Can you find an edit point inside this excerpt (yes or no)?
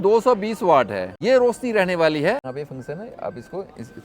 yes